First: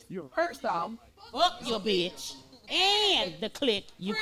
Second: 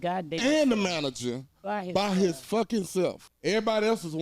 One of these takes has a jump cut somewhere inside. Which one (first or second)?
second